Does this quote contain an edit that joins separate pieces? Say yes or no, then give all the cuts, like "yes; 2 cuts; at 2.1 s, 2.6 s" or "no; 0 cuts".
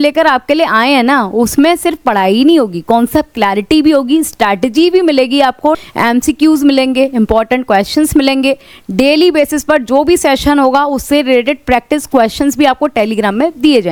no; 0 cuts